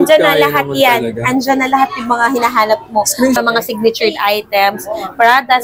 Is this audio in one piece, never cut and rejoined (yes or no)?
no